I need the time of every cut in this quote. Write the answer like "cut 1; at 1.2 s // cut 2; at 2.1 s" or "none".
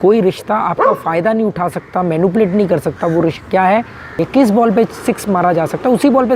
cut 1; at 4.2 s

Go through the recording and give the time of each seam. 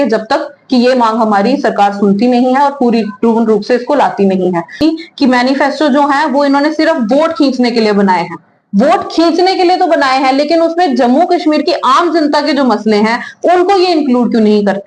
cut 1; at 4.8 s

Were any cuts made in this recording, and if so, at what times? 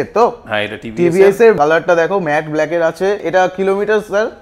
cut 1; at 1.6 s // cut 2; at 3.2 s

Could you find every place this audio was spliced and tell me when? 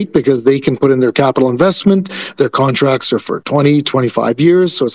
none

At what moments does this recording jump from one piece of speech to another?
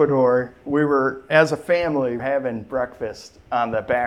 cut 1; at 2.2 s

